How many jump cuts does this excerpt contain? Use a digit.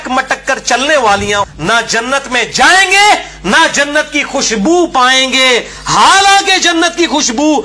1